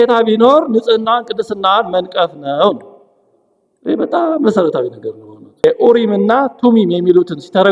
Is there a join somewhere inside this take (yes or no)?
yes